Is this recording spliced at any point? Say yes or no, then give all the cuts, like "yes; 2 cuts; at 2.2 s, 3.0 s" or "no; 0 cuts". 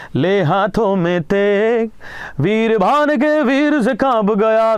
no; 0 cuts